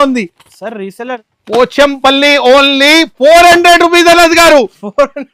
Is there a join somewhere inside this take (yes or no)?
yes